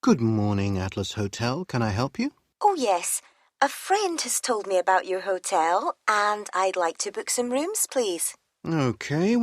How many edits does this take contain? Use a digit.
1